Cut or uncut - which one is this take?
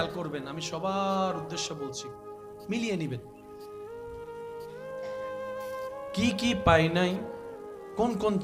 cut